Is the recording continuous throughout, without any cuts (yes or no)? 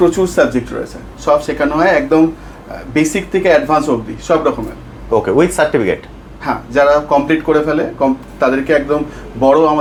yes